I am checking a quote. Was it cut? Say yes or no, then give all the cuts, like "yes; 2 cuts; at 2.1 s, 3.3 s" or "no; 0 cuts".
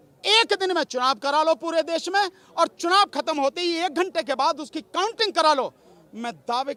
no; 0 cuts